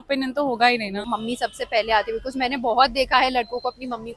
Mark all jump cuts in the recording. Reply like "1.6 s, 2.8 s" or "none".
1.0 s